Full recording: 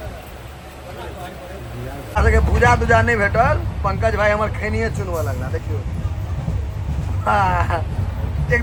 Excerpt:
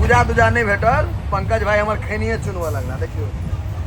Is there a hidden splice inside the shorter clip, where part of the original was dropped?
no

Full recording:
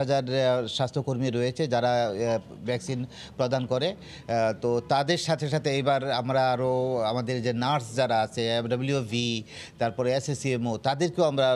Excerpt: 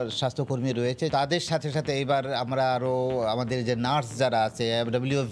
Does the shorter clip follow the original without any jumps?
no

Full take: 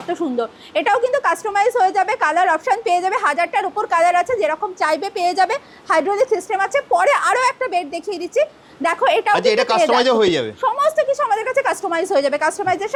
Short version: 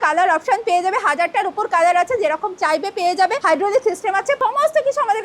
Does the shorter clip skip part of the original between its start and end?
yes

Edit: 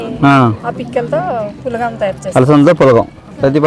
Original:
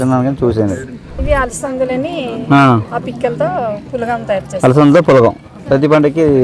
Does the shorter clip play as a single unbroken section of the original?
yes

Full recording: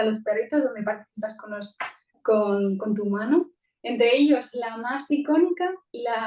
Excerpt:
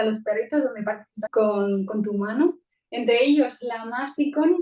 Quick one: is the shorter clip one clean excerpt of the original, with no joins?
no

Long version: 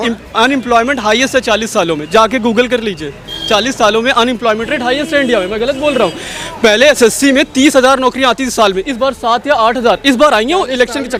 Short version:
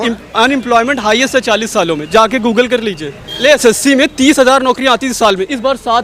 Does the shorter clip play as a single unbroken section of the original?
no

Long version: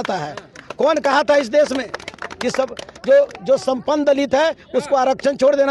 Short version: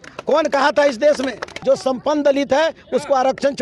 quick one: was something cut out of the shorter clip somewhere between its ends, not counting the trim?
yes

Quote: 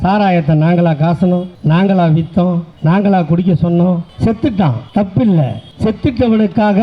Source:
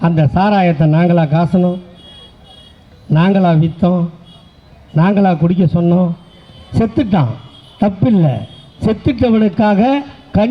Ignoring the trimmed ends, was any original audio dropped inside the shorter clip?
yes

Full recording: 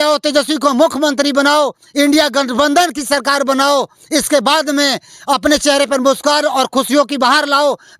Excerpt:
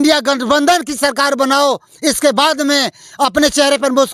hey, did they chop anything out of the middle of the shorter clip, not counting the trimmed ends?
no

